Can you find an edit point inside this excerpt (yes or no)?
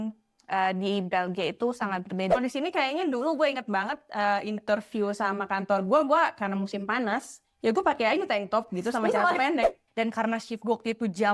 yes